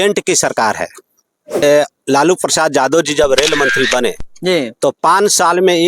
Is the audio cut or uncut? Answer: cut